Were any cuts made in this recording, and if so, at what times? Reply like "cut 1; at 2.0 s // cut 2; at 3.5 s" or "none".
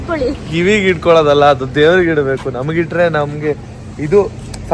none

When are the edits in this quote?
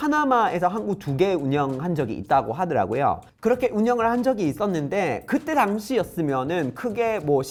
none

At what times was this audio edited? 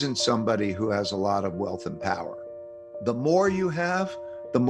cut 1; at 2.8 s

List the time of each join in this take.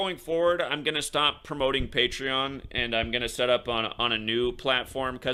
none

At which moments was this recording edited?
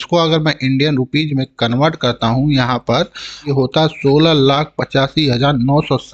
cut 1; at 3.5 s

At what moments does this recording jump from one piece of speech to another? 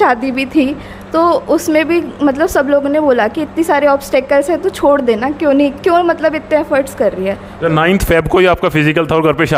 none

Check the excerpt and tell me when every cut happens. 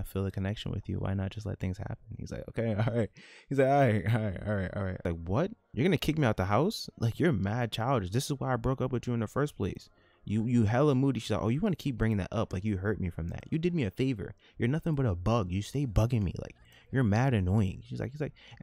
cut 1; at 5.0 s

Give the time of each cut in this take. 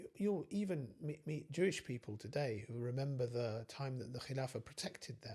none

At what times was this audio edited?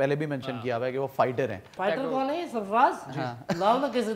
cut 1; at 1.8 s

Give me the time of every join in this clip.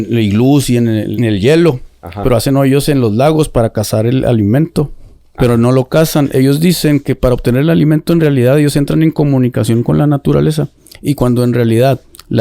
cut 1; at 1.1 s

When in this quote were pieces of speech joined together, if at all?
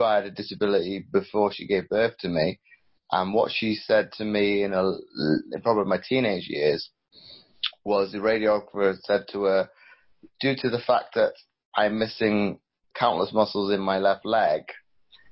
cut 1; at 12.9 s

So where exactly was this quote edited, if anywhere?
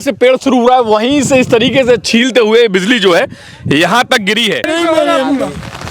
cut 1; at 4.7 s

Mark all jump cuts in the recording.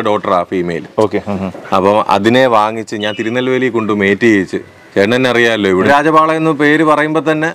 cut 1; at 5.9 s

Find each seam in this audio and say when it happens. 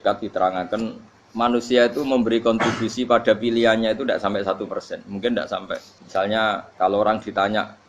cut 1; at 6.0 s // cut 2; at 6.7 s

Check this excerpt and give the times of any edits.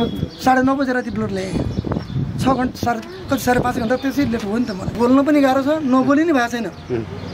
cut 1; at 4.9 s

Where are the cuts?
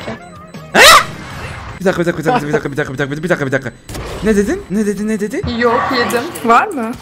cut 1; at 5.5 s

